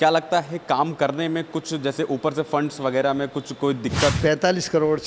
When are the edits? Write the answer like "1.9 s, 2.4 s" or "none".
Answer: 4.2 s